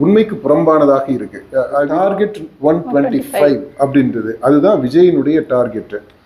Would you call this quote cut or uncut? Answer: cut